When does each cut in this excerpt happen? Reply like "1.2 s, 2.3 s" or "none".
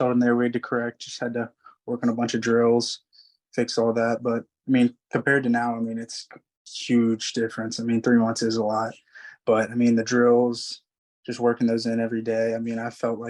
none